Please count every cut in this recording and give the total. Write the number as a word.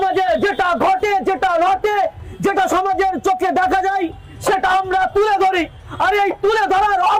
zero